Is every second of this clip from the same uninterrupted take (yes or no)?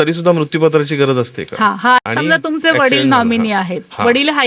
no